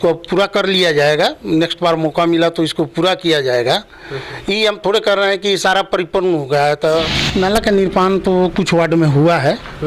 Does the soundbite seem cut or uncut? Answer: cut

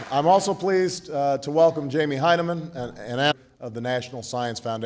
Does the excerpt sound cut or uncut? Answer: uncut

